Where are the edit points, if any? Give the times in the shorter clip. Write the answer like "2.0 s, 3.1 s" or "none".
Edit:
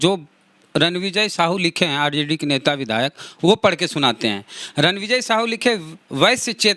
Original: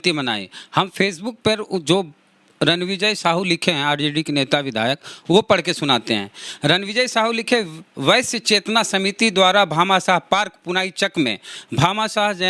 none